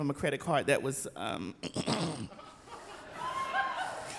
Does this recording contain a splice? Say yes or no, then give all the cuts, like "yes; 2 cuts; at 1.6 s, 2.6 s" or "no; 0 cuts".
no; 0 cuts